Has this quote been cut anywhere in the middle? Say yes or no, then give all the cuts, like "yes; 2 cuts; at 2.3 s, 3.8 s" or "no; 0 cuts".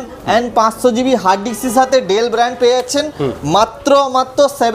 no; 0 cuts